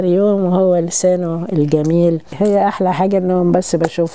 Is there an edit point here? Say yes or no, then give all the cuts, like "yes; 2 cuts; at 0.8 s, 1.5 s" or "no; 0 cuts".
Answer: yes; 1 cut; at 2.3 s